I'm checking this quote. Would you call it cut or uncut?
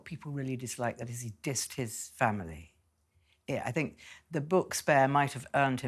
uncut